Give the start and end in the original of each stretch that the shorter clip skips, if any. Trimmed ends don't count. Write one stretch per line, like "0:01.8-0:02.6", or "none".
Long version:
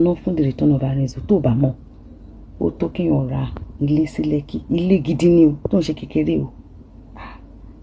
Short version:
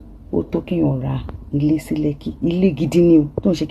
none